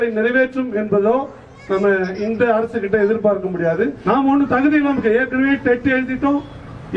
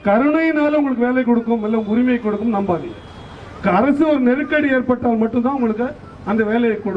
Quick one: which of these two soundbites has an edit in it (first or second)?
first